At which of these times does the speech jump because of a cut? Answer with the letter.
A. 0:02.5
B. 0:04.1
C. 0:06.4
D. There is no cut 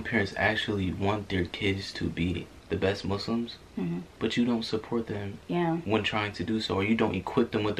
B